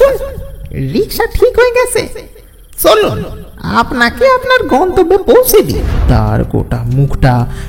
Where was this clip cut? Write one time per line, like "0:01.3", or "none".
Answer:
0:05.9